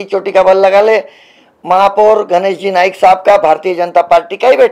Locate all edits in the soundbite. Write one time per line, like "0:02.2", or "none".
none